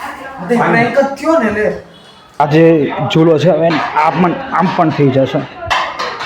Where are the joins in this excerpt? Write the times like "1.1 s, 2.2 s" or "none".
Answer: 2.2 s